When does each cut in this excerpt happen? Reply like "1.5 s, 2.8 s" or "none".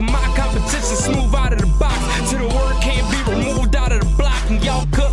none